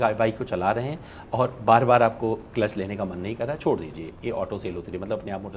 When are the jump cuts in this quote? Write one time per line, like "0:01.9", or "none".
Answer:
none